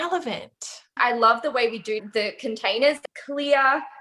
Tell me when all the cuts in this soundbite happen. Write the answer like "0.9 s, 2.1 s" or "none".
0.9 s, 2.0 s, 3.0 s

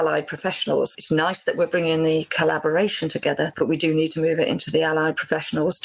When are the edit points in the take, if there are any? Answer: 1.0 s

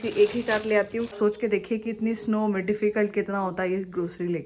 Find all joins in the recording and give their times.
1.1 s

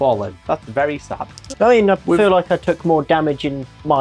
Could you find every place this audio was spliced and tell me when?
1.4 s

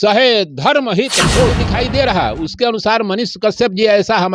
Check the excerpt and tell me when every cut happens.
1.6 s

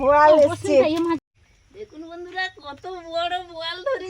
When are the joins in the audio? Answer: 1.2 s

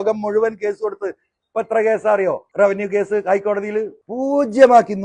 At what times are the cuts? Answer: 2.5 s, 4.0 s

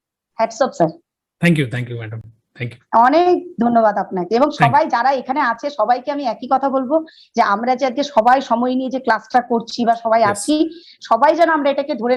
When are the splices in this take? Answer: none

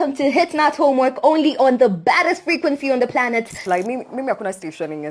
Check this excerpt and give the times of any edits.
3.6 s

